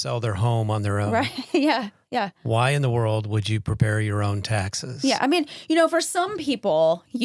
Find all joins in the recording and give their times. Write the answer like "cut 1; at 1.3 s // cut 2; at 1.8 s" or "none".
none